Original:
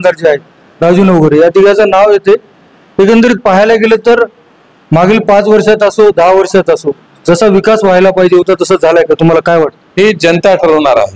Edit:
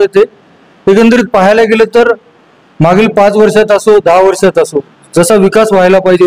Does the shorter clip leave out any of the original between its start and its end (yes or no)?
no